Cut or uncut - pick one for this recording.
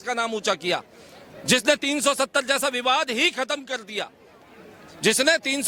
uncut